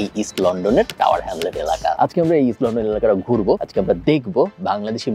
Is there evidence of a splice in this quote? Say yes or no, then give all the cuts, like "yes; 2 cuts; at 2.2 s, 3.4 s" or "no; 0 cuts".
yes; 1 cut; at 2.0 s